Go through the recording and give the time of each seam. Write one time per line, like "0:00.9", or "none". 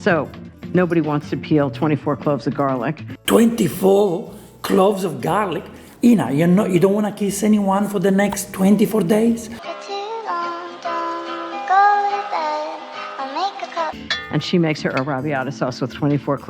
0:05.8
0:14.0